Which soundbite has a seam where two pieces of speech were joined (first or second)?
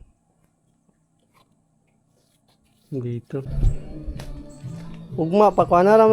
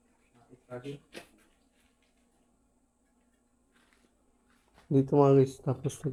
first